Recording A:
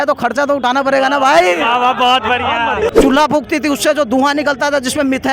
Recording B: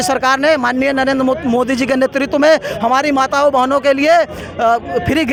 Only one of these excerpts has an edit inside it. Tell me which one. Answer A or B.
A